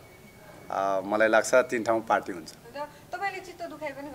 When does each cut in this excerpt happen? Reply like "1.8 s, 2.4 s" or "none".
none

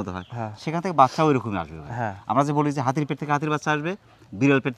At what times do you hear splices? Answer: none

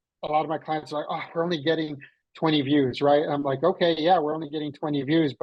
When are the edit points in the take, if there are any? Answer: none

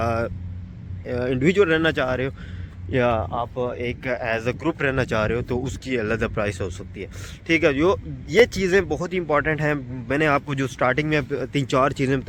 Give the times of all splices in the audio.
none

